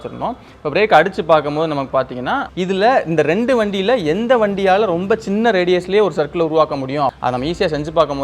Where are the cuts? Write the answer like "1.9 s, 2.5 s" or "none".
2.5 s, 7.2 s